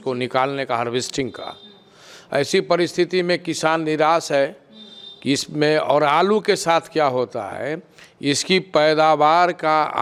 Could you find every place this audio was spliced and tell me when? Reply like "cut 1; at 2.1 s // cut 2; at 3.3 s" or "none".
none